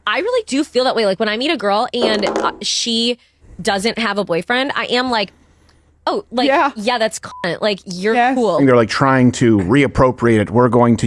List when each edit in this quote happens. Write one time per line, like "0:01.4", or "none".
0:08.6